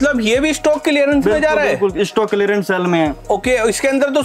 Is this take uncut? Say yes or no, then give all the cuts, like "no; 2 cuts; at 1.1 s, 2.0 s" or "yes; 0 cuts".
yes; 0 cuts